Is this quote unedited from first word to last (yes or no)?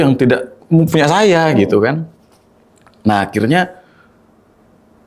yes